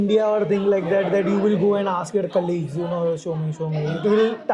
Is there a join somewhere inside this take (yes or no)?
no